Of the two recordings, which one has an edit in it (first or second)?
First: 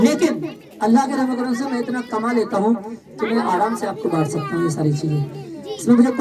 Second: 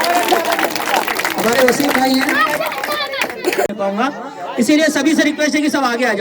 second